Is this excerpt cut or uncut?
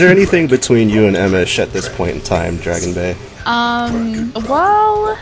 cut